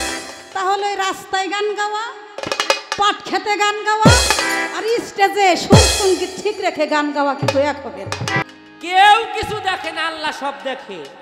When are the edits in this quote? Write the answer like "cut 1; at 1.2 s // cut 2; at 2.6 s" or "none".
cut 1; at 8.4 s

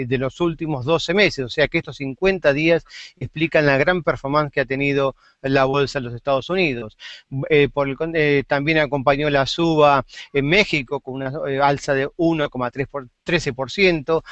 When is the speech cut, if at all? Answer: none

